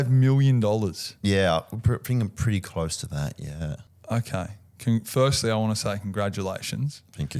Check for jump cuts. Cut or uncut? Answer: uncut